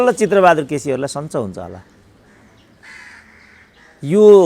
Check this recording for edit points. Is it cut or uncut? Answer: uncut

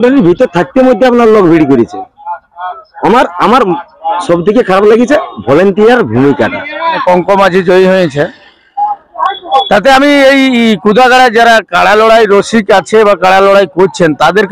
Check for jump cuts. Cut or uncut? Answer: cut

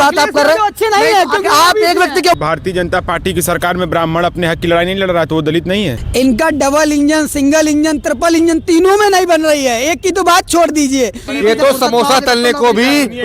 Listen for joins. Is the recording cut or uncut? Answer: cut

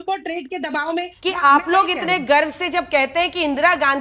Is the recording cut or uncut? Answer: cut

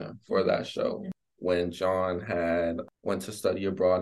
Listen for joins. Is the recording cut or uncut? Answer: cut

